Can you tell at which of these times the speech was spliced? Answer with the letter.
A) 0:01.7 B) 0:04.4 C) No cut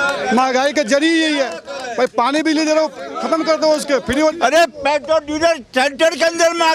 B